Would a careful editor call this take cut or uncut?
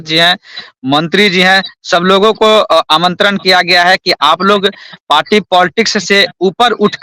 uncut